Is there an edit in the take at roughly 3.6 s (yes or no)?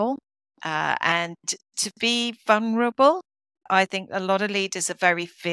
yes